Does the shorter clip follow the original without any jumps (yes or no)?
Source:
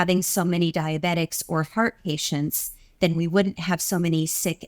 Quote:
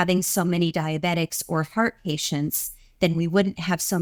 yes